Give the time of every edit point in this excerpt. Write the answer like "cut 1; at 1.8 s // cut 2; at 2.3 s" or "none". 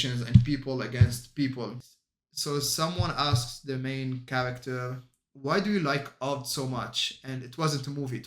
cut 1; at 1.8 s